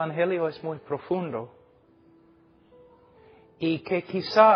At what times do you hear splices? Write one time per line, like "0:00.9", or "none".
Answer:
none